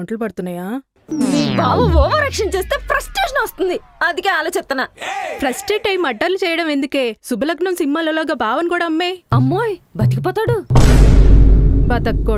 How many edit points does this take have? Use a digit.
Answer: 0